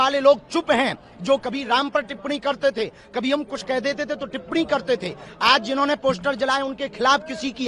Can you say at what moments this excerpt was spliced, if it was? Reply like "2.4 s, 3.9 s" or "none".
none